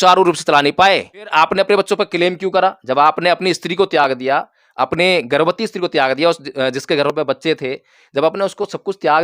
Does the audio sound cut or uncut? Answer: uncut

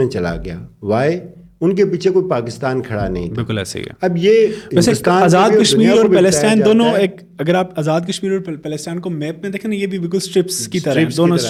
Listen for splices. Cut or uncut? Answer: uncut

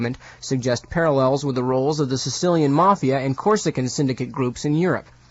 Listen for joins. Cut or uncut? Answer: cut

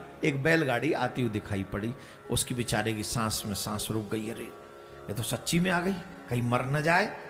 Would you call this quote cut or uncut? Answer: uncut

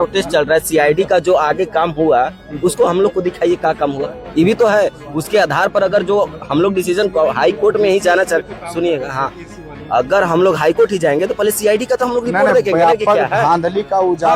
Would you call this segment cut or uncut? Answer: uncut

